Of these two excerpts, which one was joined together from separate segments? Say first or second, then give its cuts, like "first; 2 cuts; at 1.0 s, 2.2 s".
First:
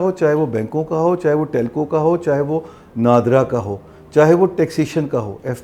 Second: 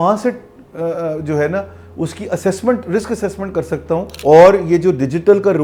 second; 1 cut; at 4.1 s